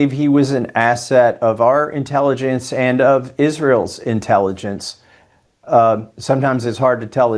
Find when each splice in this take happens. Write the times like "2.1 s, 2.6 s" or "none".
none

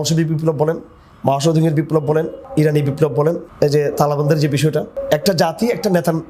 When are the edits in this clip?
2.4 s, 3.5 s, 5.0 s

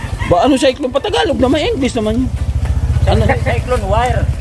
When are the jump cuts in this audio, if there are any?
none

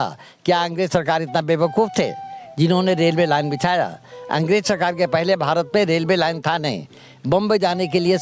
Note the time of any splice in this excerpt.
none

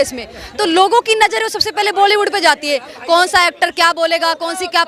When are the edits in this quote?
none

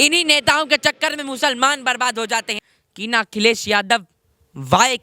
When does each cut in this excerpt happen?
2.5 s

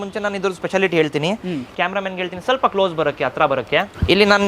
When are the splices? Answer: 1.7 s

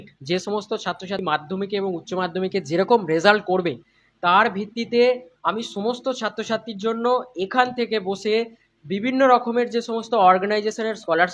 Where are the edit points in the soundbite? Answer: 1.2 s

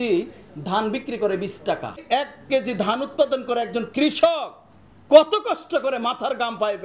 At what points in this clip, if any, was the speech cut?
2.0 s

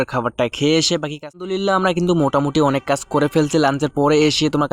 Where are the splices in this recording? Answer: 1.3 s

